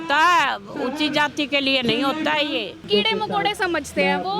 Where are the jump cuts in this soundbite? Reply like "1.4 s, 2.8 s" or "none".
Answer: 2.8 s